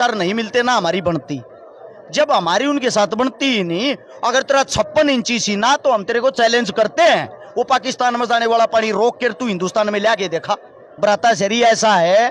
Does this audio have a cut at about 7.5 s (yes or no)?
no